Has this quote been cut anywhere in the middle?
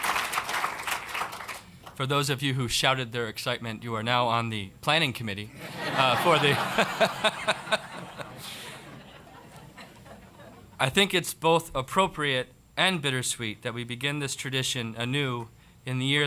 yes; 1 cut; at 3.1 s

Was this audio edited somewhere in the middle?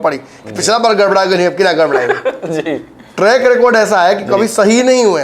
no; 0 cuts

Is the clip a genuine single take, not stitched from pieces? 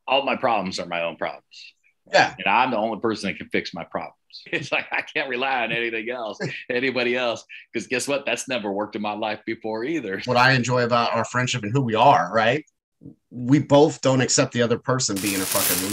no; 2 cuts; at 4.5 s, 10.2 s

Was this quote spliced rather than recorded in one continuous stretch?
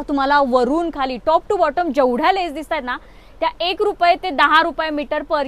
no; 0 cuts

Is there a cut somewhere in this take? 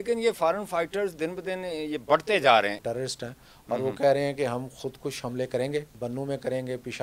yes; 2 cuts; at 2.8 s, 5.9 s

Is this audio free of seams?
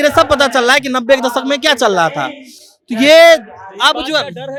yes; 0 cuts

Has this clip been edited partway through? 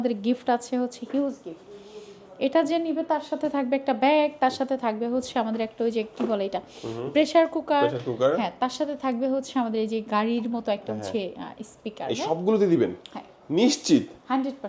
no; 0 cuts

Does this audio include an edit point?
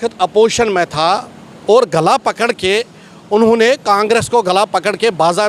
no; 0 cuts

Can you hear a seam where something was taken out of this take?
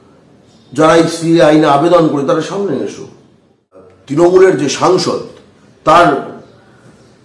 yes; 1 cut; at 3.9 s

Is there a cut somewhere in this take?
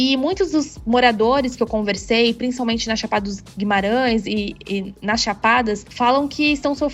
no; 0 cuts

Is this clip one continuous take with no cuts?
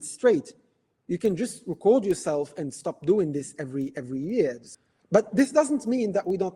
no; 1 cut; at 4.7 s

